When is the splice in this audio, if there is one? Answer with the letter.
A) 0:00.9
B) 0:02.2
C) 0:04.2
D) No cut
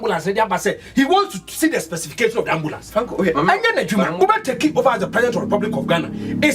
C